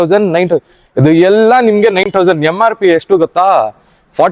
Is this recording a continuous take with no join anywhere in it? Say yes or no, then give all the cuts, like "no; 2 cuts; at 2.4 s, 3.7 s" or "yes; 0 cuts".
yes; 0 cuts